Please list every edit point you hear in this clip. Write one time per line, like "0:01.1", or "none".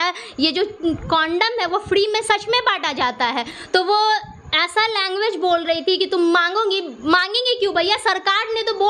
none